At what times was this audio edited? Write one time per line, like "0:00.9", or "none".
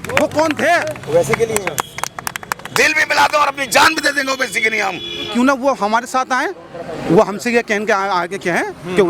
0:01.0
0:05.2

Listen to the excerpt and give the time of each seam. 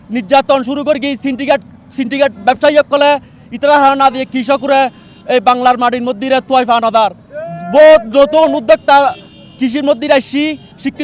none

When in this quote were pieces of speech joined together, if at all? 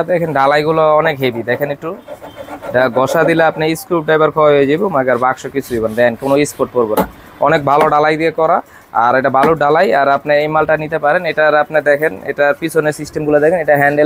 none

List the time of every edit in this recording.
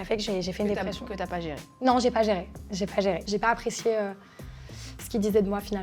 0:03.2

